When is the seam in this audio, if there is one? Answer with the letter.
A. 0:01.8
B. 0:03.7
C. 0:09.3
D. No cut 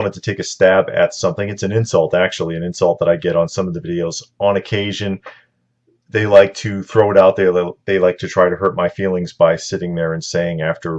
C